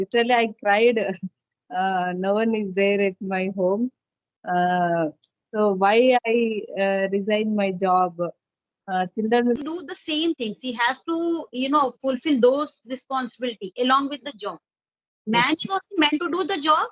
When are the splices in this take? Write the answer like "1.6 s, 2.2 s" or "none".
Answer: 9.6 s